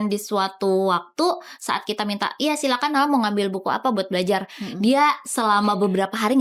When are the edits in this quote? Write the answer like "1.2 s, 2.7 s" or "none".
none